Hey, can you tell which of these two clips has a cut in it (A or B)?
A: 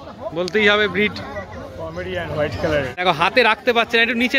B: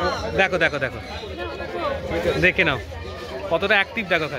A